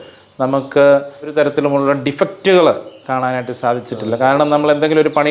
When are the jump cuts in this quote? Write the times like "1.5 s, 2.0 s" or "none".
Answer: 1.3 s